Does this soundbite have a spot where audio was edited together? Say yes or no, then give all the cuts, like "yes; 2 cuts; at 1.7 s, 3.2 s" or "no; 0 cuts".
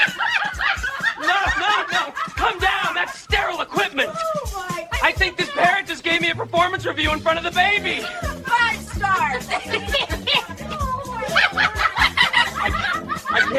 no; 0 cuts